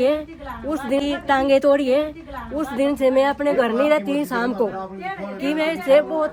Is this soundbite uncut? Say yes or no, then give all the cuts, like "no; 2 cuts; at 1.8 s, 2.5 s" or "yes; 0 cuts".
yes; 0 cuts